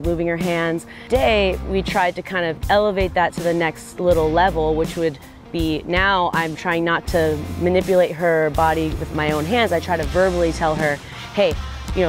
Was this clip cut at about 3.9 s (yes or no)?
no